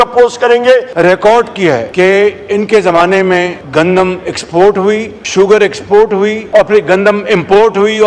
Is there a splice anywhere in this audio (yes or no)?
yes